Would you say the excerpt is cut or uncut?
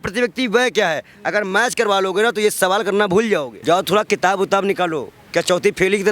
cut